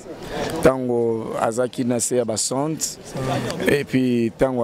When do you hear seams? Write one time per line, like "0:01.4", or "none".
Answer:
none

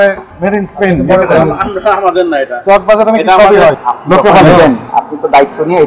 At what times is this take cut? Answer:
0:03.9

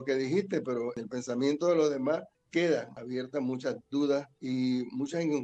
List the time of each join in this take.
0:01.0
0:02.4
0:03.0
0:04.3

